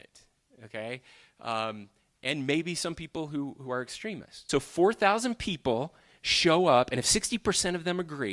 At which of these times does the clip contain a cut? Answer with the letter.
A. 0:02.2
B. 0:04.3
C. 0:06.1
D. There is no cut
B